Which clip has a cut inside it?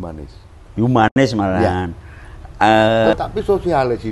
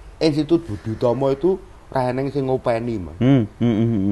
first; 1 cut; at 3.1 s

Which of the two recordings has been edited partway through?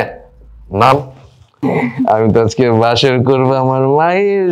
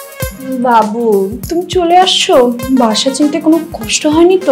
first; 1 cut; at 1.6 s

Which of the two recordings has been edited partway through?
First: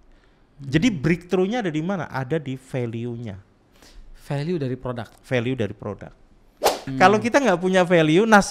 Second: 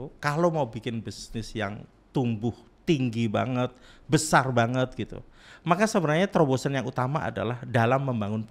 first; 1 cut; at 6.9 s

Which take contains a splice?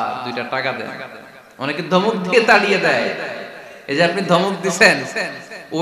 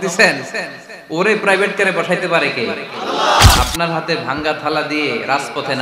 second; 1 cut; at 3.6 s

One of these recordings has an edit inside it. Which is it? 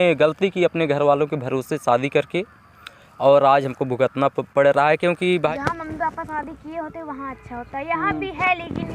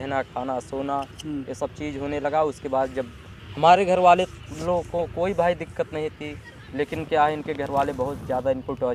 first; 1 cut; at 5.5 s

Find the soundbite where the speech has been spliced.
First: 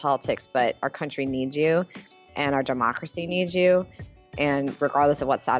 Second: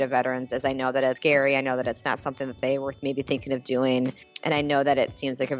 second; 2 cuts; at 1.2 s, 4.3 s

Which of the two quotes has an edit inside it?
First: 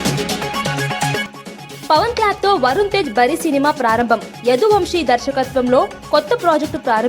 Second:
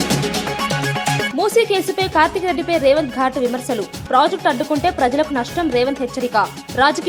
first; 1 cut; at 1.2 s

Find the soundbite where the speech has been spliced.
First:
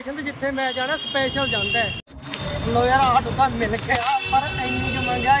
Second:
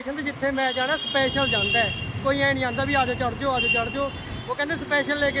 first; 1 cut; at 2.0 s

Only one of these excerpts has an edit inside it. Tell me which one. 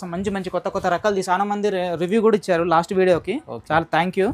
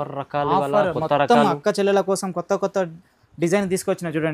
first; 1 cut; at 1.3 s

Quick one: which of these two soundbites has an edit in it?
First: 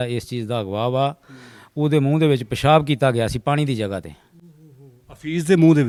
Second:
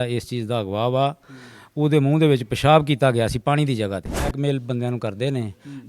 second; 1 cut; at 4.3 s

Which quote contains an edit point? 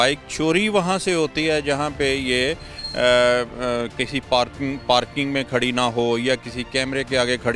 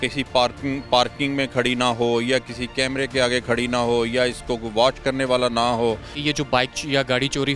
second; 1 cut; at 6.1 s

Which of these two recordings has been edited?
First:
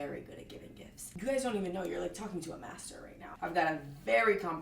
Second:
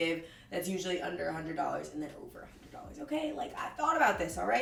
first; 2 cuts; at 1.1 s, 3.3 s

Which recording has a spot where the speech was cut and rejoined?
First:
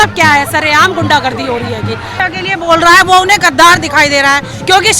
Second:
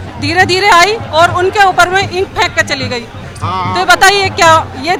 first; 1 cut; at 2.2 s

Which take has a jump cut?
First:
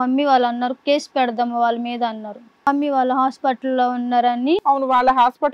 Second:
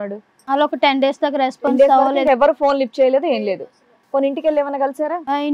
first; 1 cut; at 2.6 s

